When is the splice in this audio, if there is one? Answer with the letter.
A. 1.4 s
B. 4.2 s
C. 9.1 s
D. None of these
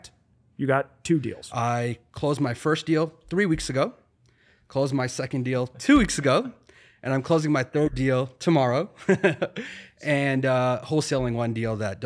A